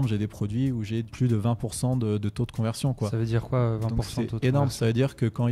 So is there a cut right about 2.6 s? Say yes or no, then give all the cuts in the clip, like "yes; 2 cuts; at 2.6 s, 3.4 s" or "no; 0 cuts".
no; 1 cut; at 1.1 s